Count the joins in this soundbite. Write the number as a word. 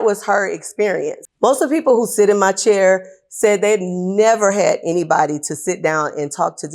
one